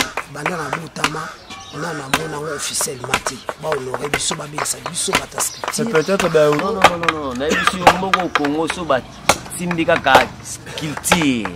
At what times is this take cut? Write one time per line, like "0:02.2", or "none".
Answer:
0:06.6